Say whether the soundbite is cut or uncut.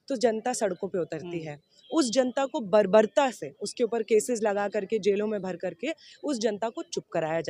uncut